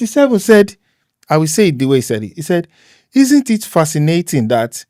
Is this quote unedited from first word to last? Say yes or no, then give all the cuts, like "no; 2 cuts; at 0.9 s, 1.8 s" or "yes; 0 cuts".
yes; 0 cuts